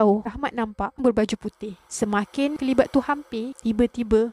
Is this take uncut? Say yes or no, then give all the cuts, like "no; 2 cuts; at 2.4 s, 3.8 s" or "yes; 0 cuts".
no; 1 cut; at 0.9 s